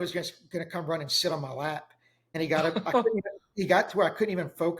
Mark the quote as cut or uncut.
uncut